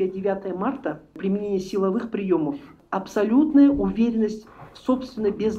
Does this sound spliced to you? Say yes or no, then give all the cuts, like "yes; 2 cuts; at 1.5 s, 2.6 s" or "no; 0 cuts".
yes; 2 cuts; at 1.2 s, 2.8 s